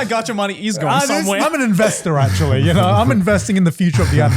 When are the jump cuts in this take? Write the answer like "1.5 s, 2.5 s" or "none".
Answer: 1.4 s